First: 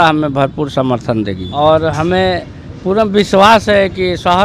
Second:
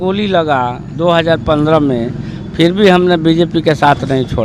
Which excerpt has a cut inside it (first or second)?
first